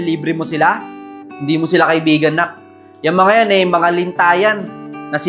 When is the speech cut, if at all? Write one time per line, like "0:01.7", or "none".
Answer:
none